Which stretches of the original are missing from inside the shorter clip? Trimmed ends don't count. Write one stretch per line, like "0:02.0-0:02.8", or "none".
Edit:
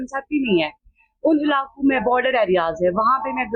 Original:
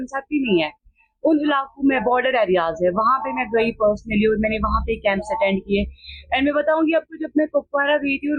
none

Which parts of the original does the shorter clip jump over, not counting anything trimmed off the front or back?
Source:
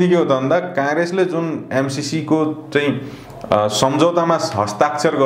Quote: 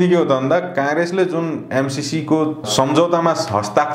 0:02.7-0:03.7

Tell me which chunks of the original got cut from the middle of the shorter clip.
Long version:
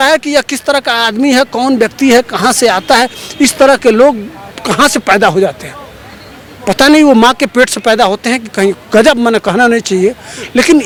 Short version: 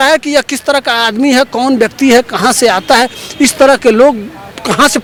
none

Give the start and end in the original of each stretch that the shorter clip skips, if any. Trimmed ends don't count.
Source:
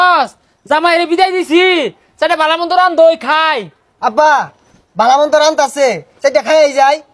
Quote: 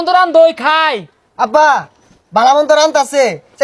none

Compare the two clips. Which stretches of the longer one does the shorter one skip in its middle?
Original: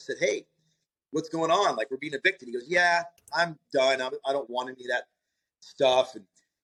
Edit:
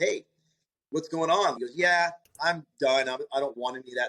0:01.8-0:02.5

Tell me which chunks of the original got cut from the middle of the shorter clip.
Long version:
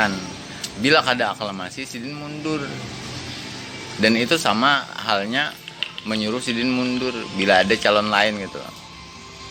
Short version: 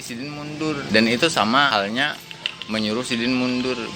0:02.7-0:03.9
0:04.8-0:05.1

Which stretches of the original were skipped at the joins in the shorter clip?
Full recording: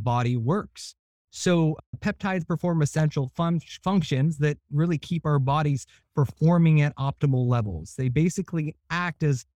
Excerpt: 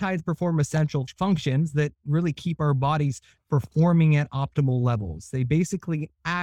0:03.3-0:03.7

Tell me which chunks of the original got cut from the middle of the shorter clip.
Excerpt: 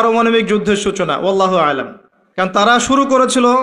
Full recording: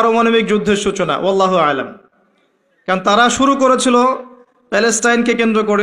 0:02.7-0:03.2

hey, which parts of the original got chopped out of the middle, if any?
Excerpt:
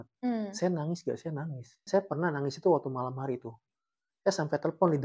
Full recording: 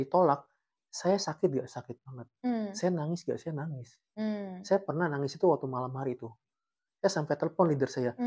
0:04.0-0:04.5

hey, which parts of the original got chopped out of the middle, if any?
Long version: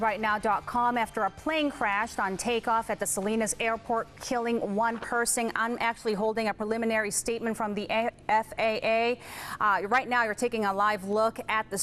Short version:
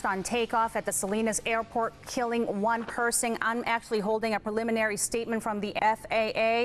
0:07.9-0:08.2

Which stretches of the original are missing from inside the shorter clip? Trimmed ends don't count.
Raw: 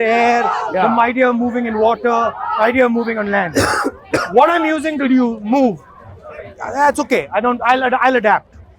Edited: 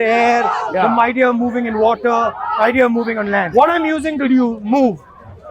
0:03.5-0:04.3

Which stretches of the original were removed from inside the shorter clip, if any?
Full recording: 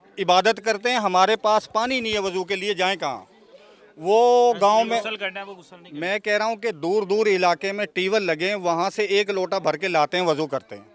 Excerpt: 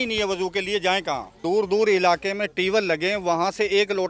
0:03.3-0:06.8

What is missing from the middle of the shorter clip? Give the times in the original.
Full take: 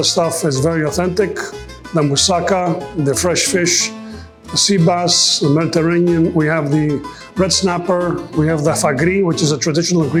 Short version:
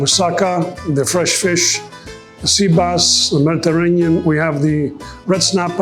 none

